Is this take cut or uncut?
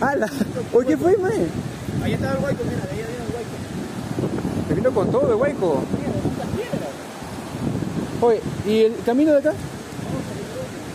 uncut